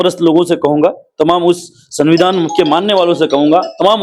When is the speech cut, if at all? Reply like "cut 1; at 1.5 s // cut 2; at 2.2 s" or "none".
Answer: none